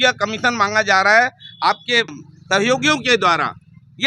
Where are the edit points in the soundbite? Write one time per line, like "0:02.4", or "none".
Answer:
0:02.2